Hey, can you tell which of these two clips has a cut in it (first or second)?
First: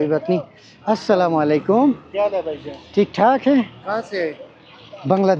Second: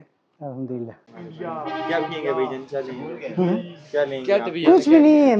second